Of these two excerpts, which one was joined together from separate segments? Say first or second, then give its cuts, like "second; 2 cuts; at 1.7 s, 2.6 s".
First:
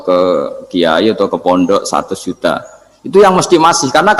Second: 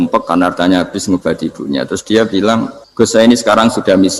second; 1 cut; at 2.8 s